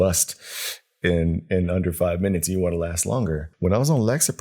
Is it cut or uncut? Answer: cut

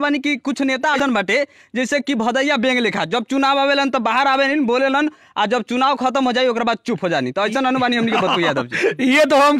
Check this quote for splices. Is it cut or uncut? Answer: cut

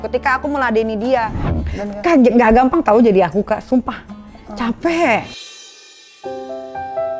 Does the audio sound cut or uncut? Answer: cut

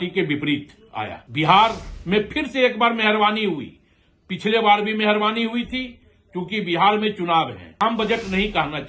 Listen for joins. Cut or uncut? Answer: cut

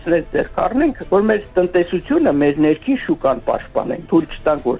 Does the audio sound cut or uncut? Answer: uncut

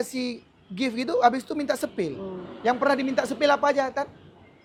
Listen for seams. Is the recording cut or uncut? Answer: uncut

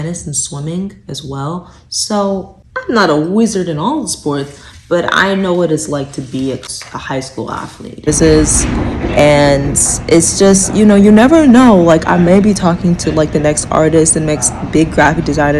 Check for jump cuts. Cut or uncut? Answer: cut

